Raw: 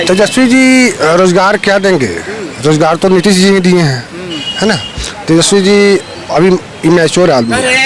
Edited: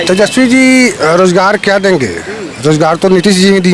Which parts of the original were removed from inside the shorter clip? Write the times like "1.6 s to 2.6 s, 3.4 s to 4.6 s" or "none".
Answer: none